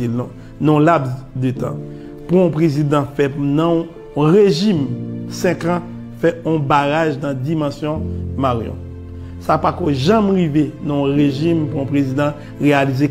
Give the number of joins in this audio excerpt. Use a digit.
0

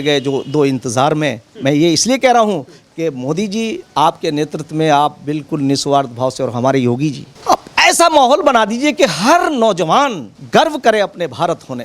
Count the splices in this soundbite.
2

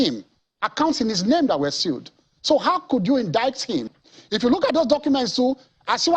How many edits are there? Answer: 1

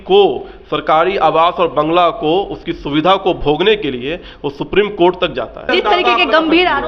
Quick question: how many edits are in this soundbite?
1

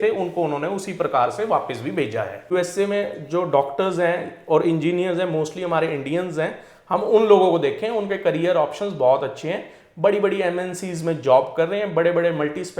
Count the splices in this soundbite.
1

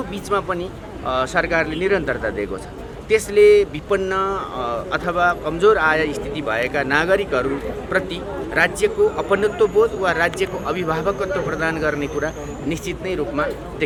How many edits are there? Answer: 0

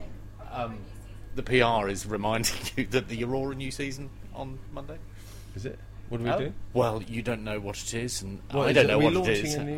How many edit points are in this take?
1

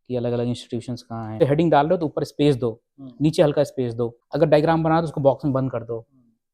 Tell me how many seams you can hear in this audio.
2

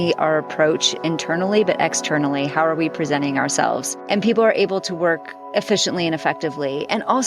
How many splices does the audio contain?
1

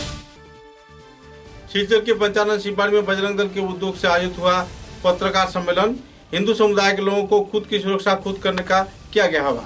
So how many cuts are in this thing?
1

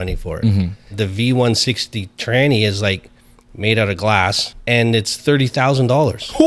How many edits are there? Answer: 2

